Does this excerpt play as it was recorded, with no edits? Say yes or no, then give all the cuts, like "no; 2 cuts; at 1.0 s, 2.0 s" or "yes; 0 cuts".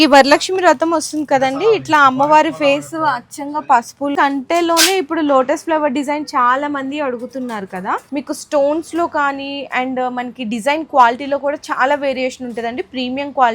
no; 2 cuts; at 4.1 s, 8.1 s